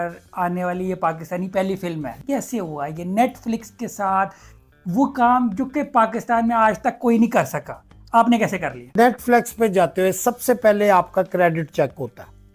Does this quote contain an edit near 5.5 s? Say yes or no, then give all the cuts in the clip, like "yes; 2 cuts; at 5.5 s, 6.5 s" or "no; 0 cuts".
no; 2 cuts; at 2.2 s, 8.9 s